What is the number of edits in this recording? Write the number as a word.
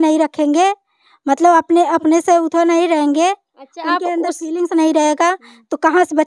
zero